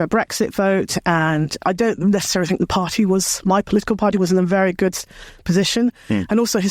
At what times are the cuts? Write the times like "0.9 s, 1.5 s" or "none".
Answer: 1.6 s